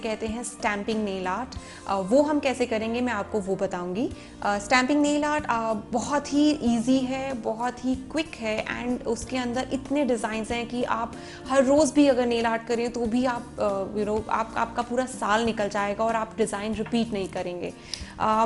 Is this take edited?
no; 0 cuts

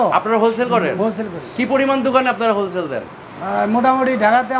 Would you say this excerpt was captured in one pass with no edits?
yes; 0 cuts

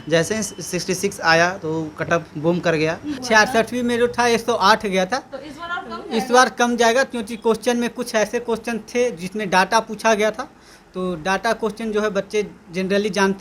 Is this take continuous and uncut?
no; 1 cut; at 3.2 s

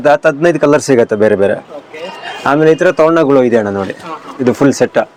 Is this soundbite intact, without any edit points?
yes; 0 cuts

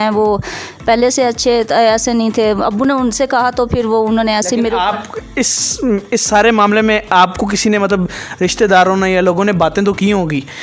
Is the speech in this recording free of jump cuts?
yes; 0 cuts

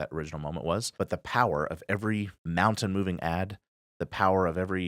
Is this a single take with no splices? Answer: no; 2 cuts; at 0.9 s, 2.4 s

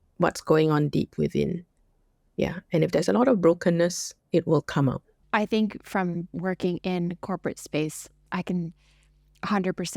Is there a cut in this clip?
yes; 2 cuts; at 5.2 s, 8.2 s

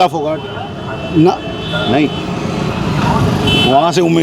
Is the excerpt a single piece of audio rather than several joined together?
yes; 0 cuts

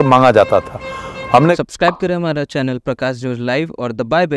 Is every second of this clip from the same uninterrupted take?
no; 1 cut; at 1.5 s

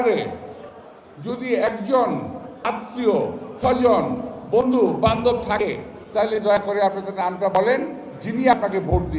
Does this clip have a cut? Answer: no; 0 cuts

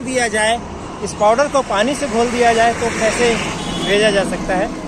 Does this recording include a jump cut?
no; 0 cuts

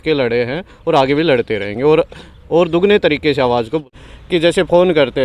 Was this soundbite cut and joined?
yes; 1 cut; at 3.9 s

